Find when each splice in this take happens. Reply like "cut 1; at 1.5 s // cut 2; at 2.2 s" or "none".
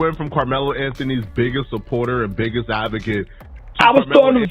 cut 1; at 3.6 s